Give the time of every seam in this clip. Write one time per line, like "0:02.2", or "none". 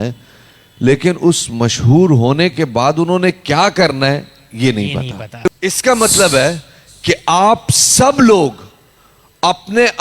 0:05.2

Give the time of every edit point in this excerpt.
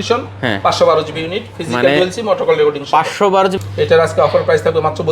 0:03.5

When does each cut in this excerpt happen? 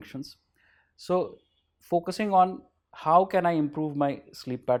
none

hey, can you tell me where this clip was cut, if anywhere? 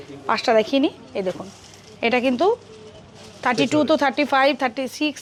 none

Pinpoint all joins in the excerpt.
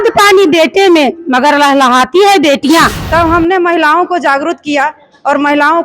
0:03.0

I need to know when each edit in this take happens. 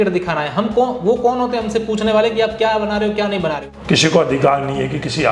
0:03.7

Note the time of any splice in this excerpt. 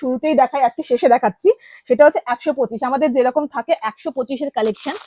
none

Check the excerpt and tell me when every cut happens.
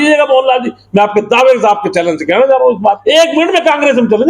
0:03.0

